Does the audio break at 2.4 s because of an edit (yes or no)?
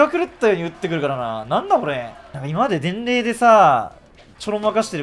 yes